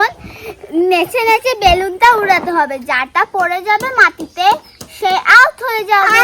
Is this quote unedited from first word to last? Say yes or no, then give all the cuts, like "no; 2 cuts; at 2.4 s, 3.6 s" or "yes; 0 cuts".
yes; 0 cuts